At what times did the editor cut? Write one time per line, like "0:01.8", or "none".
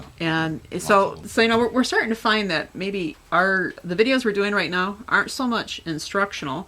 0:01.2
0:03.4